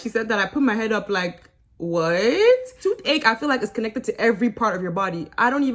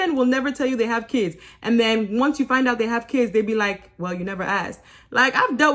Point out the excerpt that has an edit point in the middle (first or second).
first